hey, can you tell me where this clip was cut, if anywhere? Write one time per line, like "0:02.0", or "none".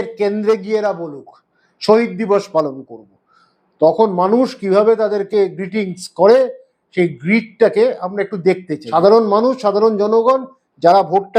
0:08.7